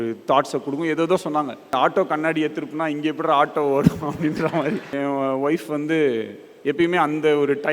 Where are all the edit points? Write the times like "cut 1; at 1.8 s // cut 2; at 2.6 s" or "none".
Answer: cut 1; at 1.7 s // cut 2; at 4.9 s